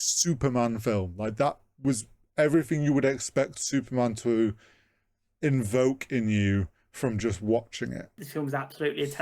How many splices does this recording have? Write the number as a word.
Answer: one